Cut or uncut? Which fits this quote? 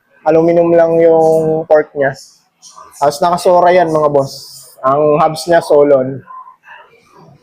uncut